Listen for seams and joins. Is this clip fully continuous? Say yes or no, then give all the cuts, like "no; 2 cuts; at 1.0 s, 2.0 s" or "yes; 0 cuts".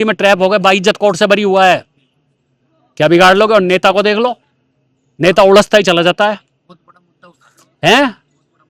yes; 0 cuts